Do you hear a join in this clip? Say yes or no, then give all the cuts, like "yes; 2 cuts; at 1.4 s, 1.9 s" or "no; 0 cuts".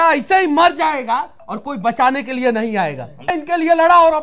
yes; 1 cut; at 3.3 s